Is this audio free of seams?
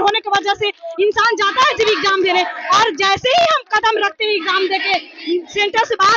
yes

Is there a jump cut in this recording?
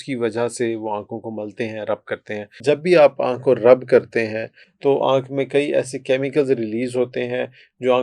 yes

